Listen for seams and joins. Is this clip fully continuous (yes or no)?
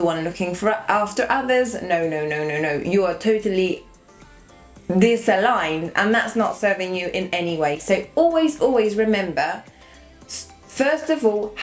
yes